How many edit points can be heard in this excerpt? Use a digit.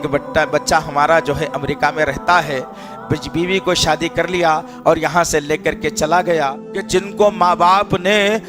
1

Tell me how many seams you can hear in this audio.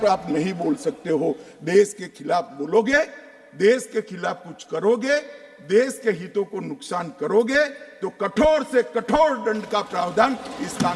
0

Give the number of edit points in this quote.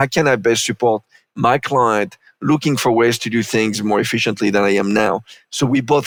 0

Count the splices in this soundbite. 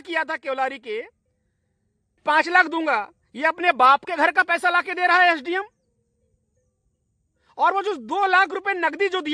1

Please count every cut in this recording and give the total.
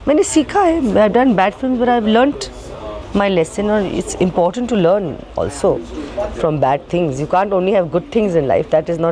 0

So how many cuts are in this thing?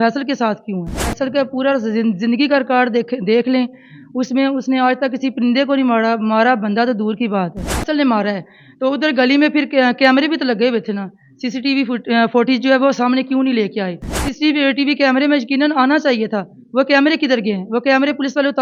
3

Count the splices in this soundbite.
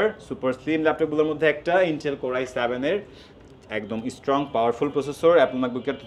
0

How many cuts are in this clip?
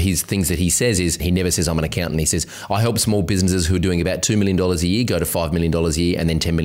1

